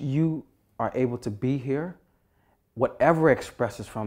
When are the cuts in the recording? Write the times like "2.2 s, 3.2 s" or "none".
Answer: none